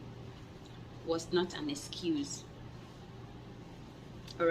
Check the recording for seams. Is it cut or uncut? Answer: cut